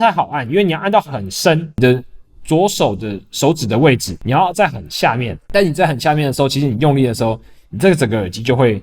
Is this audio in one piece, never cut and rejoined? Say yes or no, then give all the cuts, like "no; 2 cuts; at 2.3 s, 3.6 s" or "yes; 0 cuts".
no; 3 cuts; at 1.8 s, 4.1 s, 5.3 s